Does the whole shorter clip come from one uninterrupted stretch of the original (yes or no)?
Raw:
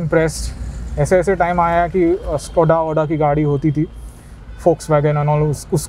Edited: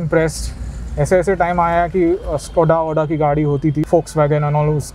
no